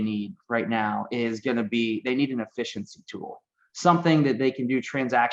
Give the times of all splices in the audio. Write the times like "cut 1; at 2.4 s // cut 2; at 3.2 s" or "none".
none